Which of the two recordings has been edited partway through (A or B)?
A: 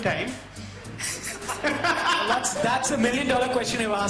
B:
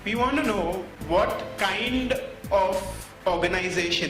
B